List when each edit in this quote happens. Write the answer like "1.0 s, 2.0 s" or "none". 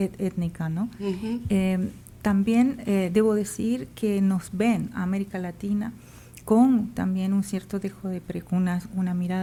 none

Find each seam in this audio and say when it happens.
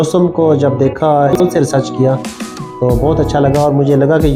1.3 s

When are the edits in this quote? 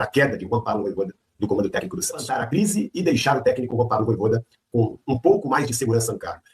2.3 s

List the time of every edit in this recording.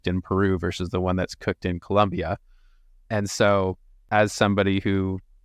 4.0 s

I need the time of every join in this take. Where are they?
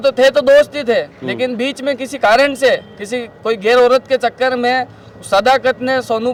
none

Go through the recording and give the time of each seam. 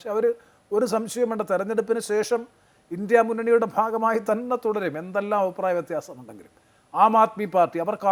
none

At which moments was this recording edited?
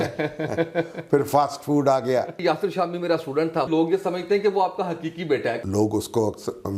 2.4 s, 3.7 s, 5.6 s

